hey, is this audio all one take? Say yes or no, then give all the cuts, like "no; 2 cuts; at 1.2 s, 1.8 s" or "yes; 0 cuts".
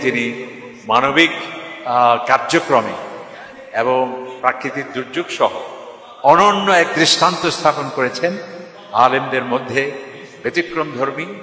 no; 1 cut; at 5.9 s